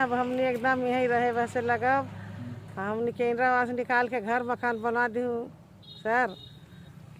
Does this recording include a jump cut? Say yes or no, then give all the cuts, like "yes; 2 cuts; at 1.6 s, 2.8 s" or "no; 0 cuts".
no; 0 cuts